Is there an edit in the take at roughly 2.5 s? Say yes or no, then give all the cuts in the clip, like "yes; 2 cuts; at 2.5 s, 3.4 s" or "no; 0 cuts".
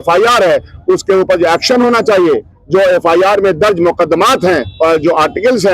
yes; 2 cuts; at 2.5 s, 4.7 s